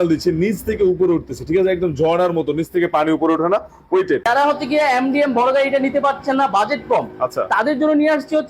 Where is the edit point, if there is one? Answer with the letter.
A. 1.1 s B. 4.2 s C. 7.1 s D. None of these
B